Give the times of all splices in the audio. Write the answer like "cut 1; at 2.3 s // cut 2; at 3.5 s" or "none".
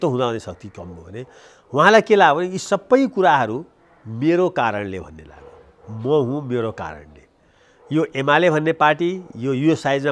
none